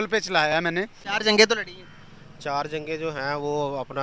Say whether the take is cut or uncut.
cut